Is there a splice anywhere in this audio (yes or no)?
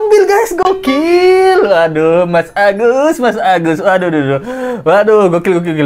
no